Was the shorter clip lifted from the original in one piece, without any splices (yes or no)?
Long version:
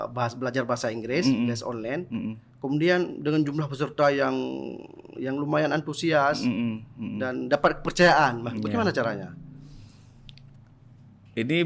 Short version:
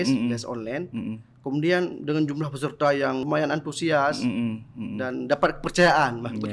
no